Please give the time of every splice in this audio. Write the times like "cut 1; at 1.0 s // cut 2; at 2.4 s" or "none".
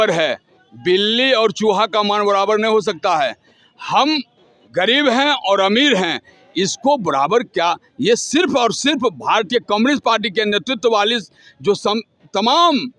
none